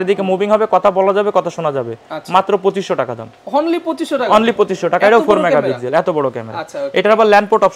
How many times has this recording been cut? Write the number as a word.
zero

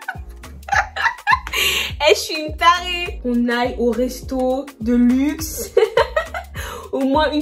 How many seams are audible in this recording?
one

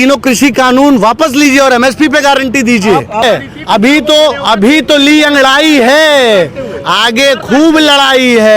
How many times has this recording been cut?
one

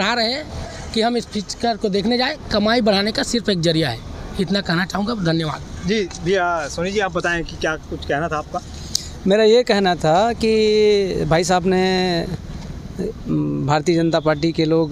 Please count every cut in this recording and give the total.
zero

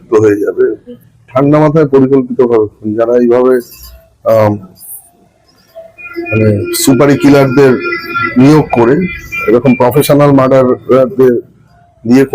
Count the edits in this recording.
one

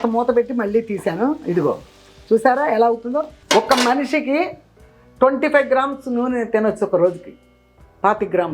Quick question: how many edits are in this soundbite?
one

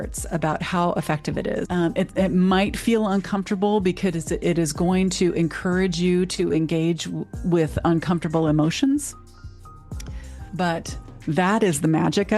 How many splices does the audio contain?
one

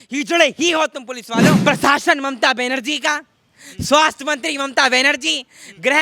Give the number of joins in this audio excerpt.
one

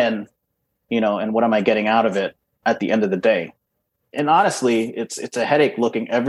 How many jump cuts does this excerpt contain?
two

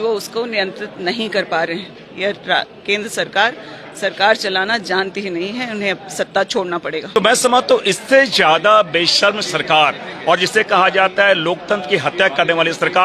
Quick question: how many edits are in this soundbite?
one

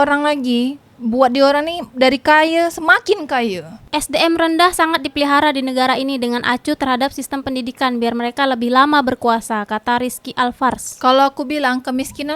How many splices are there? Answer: zero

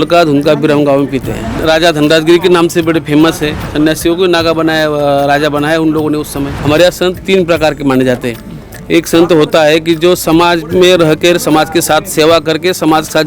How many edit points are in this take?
three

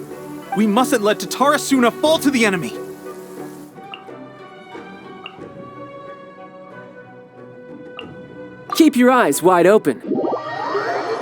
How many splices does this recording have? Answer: two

